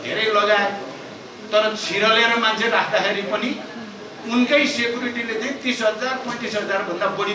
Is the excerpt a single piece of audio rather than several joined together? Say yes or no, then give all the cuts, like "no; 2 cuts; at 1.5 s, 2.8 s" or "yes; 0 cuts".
yes; 0 cuts